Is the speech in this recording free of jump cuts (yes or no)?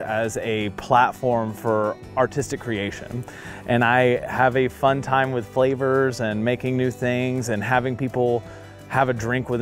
yes